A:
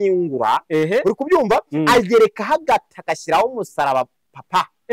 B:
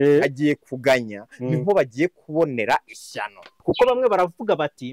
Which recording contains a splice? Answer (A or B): B